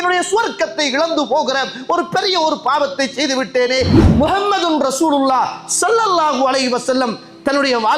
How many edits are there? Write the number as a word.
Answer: one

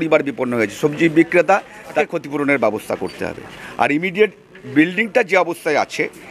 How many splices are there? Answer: one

